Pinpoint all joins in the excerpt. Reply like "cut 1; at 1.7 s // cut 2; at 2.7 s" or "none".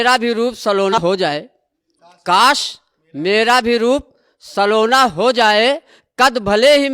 cut 1; at 1.0 s